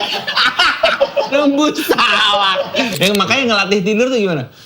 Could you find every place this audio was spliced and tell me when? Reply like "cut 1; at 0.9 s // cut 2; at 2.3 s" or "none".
cut 1; at 3.0 s